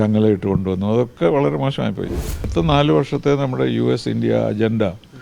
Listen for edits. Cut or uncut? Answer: cut